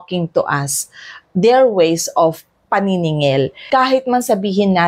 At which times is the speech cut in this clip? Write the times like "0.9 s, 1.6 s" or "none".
3.6 s

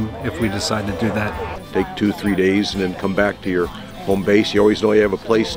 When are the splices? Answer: 1.5 s

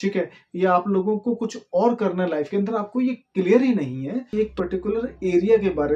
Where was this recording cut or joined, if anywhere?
4.3 s

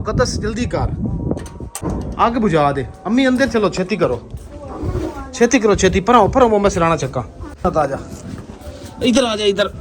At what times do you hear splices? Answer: 1.9 s, 7.4 s

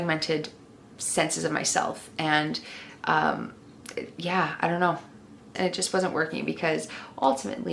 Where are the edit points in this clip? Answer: 5.5 s

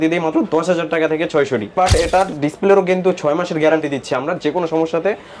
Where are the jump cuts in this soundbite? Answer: 1.7 s

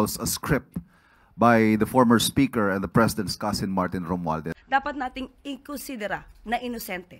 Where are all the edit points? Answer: 4.5 s

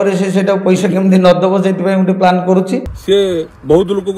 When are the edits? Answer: 2.9 s

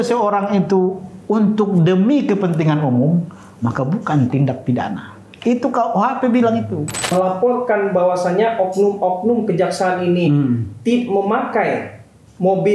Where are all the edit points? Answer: 7.0 s

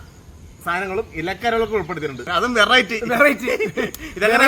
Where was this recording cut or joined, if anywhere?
2.2 s

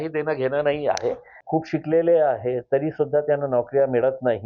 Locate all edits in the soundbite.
1.3 s

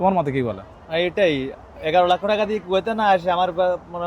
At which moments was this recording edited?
none

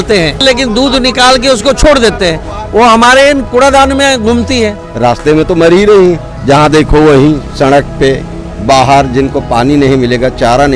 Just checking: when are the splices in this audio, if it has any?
3.5 s, 4.8 s

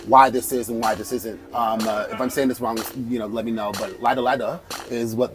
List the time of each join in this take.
1.4 s

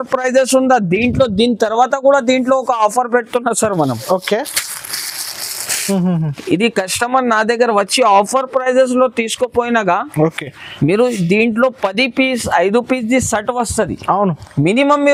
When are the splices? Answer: none

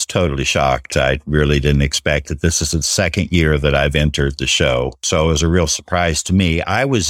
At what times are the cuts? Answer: 5.0 s

